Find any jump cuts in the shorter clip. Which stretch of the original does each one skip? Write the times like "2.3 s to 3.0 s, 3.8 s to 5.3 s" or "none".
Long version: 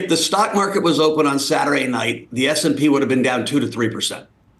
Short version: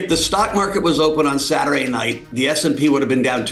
none